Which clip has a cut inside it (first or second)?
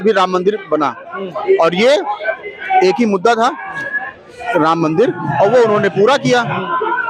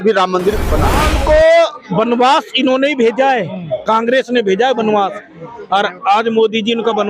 second